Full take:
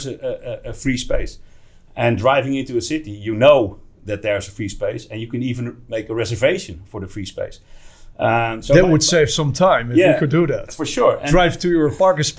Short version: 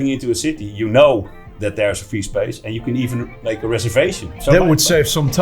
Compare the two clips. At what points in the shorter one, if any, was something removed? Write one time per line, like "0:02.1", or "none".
0:04.4